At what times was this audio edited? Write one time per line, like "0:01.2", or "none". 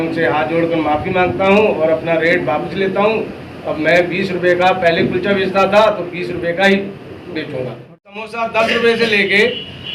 0:08.2

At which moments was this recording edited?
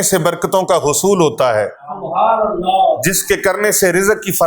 none

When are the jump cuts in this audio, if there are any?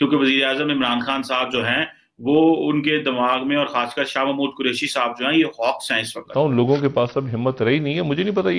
0:06.2

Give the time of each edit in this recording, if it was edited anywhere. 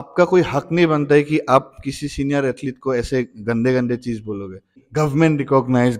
0:04.8

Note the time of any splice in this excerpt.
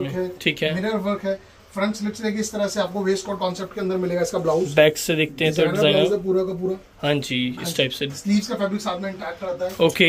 none

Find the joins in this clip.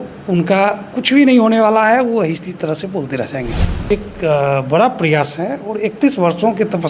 0:03.8

